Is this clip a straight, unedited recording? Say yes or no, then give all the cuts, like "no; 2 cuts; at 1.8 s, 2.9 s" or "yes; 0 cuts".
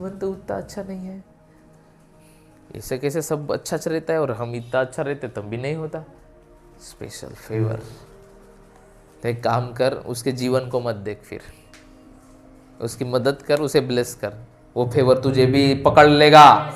yes; 0 cuts